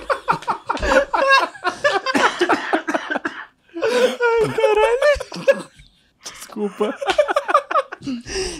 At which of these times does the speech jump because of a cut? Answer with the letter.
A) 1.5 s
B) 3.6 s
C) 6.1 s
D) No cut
C